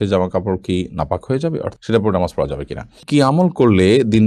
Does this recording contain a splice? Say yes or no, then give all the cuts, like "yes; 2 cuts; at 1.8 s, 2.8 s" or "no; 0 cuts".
yes; 2 cuts; at 1.8 s, 3.0 s